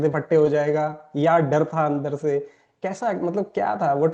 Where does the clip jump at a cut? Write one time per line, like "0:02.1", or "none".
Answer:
none